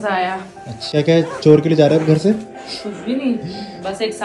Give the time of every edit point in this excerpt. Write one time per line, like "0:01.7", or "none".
0:00.9